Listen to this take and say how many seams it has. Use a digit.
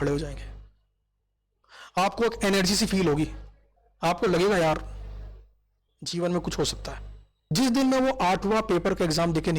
1